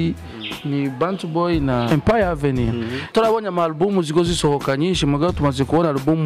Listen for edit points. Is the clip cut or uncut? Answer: cut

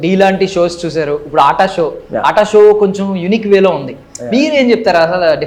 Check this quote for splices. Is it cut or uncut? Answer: uncut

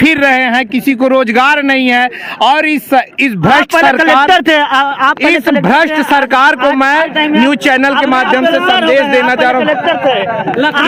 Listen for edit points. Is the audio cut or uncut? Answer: uncut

